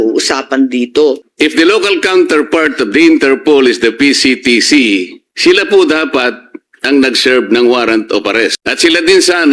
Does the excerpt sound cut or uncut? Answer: cut